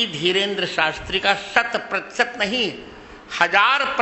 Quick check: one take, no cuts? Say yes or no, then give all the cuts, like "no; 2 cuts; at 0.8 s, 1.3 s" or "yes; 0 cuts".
yes; 0 cuts